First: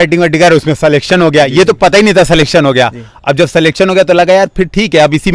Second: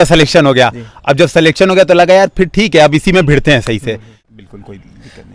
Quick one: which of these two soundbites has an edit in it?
second; 1 cut; at 4.2 s

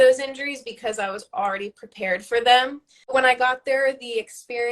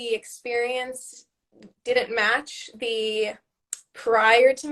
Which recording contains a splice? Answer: first; 1 cut; at 3.1 s

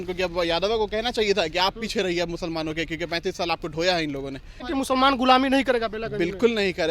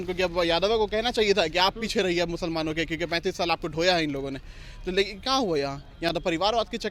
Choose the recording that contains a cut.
first; 1 cut; at 4.7 s

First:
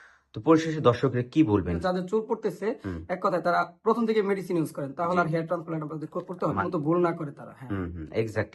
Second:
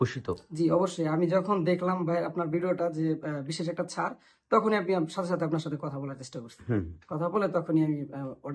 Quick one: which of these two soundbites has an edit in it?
first; 2 cuts; at 1.8 s, 6.6 s

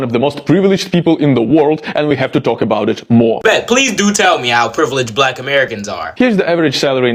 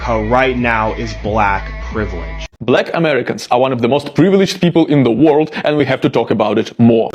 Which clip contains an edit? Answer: second; 1 cut; at 2.5 s

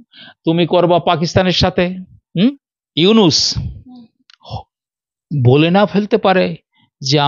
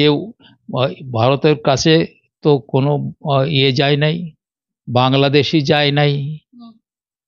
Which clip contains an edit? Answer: first; 1 cut; at 2.7 s

